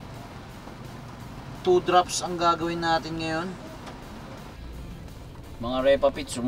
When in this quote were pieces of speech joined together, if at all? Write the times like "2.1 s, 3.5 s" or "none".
4.4 s